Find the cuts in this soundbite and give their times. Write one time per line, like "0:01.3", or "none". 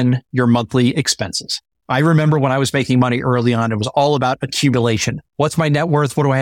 0:01.7